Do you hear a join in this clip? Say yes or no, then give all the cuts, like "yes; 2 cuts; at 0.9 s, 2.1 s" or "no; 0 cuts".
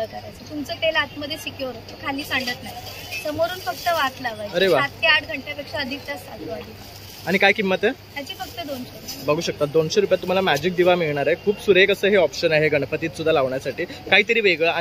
no; 0 cuts